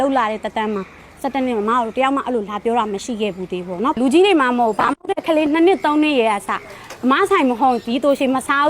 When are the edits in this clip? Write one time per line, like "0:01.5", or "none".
0:04.0